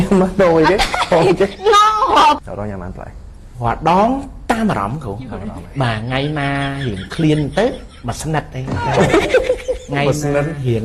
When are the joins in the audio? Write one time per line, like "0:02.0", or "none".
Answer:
0:02.4